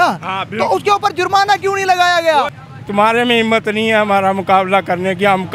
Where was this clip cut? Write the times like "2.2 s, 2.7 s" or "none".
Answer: 2.6 s